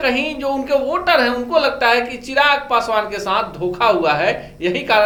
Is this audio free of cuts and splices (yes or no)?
yes